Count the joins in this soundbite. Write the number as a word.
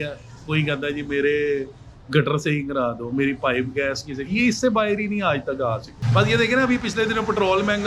one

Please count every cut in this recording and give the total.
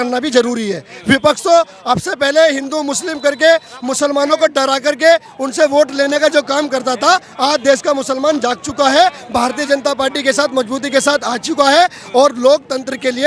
zero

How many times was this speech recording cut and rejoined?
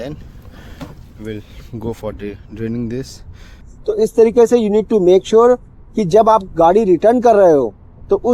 zero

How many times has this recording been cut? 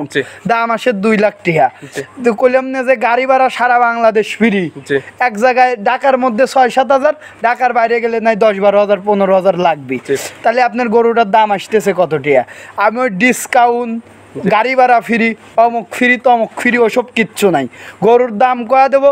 zero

